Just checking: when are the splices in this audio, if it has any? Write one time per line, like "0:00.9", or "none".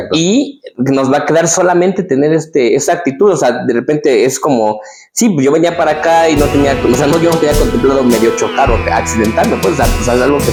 none